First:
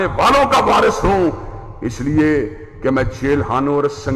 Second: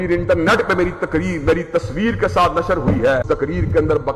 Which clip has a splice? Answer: second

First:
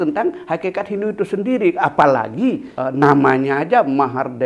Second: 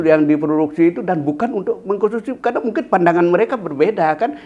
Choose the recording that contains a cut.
first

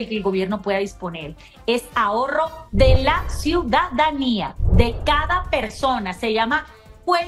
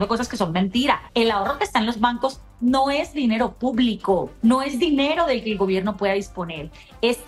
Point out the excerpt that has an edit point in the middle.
second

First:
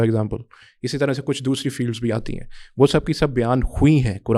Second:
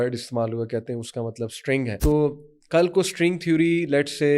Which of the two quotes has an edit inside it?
second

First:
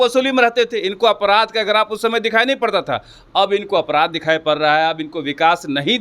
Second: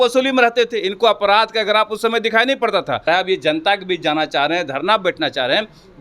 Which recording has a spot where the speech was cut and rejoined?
second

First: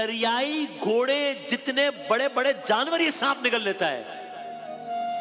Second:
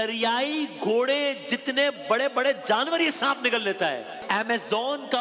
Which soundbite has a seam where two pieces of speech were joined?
second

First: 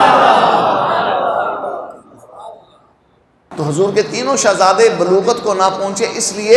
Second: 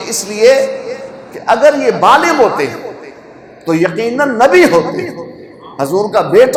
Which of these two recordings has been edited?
first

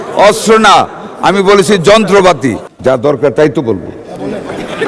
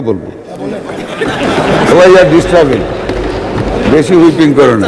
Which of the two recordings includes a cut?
first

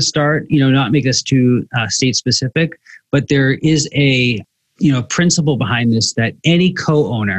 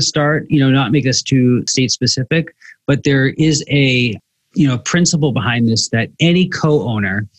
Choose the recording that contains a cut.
second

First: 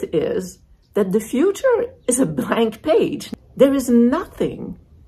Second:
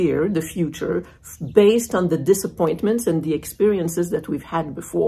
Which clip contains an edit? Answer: first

